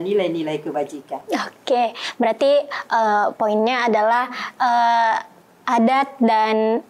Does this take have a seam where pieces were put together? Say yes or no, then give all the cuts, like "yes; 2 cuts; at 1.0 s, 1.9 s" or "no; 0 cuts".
no; 0 cuts